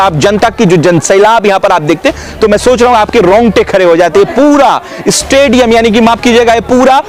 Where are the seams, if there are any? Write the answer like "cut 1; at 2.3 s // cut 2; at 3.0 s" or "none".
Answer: none